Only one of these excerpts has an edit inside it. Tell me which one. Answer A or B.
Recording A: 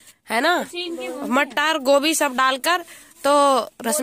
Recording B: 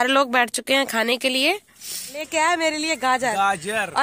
B